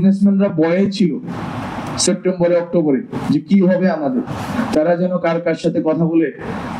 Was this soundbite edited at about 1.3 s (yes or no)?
no